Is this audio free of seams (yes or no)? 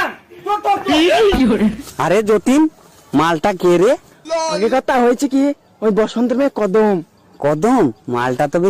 no